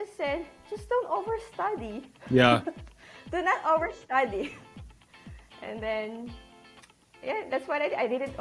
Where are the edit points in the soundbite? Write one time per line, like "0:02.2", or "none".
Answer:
none